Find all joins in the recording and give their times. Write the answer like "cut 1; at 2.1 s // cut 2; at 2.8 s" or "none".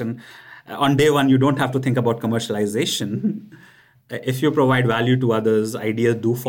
none